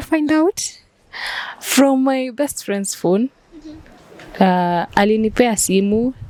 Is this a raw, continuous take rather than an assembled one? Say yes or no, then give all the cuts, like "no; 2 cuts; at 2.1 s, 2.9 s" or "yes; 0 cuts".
yes; 0 cuts